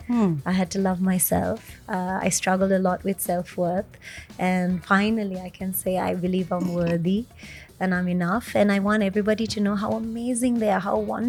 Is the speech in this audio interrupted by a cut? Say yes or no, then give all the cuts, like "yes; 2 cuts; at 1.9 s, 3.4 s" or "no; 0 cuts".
no; 0 cuts